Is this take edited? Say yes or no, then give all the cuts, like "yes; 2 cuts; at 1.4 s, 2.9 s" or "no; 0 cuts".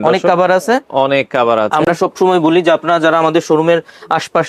no; 0 cuts